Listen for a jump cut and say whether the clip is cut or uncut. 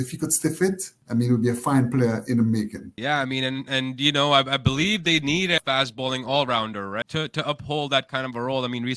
cut